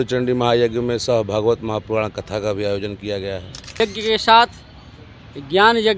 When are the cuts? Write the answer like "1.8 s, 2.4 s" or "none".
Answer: 3.8 s

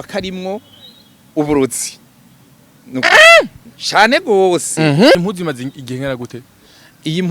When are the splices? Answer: 5.2 s

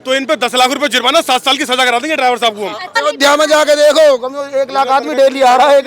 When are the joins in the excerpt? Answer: 2.9 s

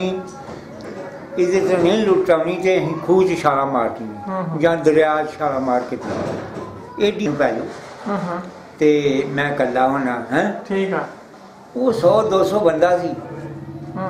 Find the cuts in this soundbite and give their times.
7.2 s

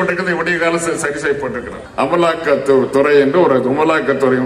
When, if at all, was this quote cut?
1.8 s

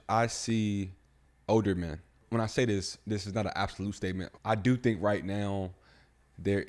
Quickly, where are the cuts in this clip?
1.3 s, 2.2 s, 4.3 s

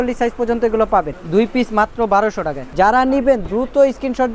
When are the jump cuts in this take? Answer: 1.2 s, 2.6 s

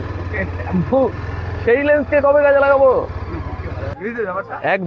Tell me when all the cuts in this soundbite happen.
3.9 s

